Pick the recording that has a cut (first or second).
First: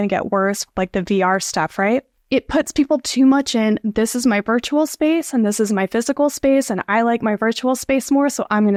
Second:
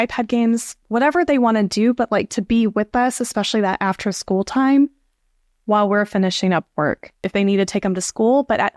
second